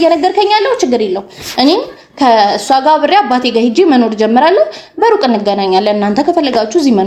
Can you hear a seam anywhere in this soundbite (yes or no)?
no